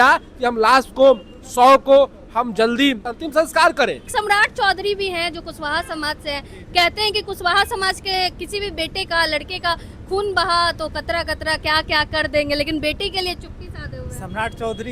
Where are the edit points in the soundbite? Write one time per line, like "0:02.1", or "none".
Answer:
0:03.2
0:04.0